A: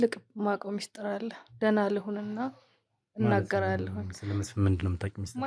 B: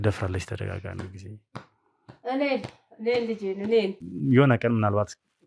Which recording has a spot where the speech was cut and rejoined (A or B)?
B